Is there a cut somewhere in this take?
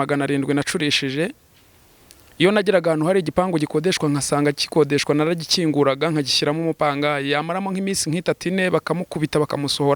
no; 0 cuts

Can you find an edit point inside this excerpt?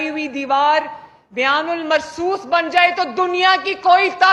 no; 0 cuts

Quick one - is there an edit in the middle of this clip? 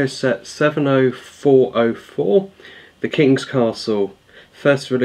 no; 0 cuts

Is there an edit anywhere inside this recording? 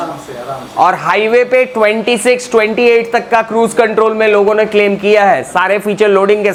no; 0 cuts

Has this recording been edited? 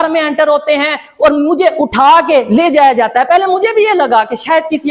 no; 0 cuts

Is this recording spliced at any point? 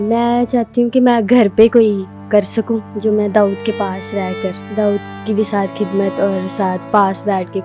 yes; 2 cuts; at 2.9 s, 4.6 s

